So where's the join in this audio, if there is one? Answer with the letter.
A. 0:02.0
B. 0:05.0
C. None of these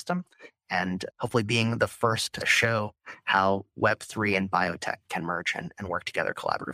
B